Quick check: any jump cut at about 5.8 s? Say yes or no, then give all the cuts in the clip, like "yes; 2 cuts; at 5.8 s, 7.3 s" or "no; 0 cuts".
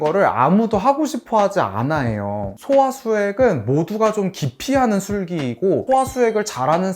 yes; 1 cut; at 5.8 s